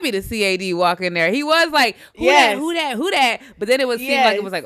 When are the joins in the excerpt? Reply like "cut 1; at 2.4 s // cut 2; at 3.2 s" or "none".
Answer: none